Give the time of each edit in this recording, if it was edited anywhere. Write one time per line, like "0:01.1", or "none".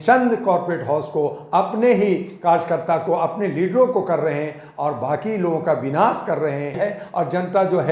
0:06.8